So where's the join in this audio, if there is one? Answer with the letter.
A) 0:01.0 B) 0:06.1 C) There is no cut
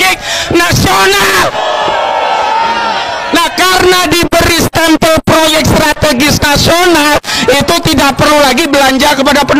C